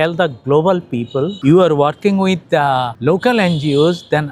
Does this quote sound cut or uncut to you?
cut